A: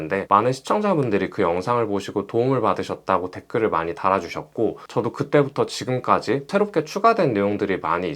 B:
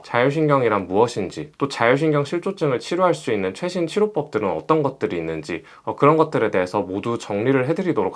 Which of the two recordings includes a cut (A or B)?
A